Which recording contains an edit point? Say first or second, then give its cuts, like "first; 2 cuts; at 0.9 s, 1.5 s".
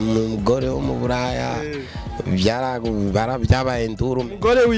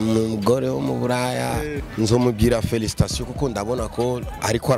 second; 1 cut; at 1.8 s